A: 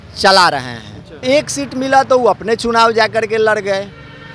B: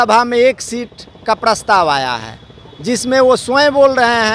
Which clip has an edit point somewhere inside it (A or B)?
A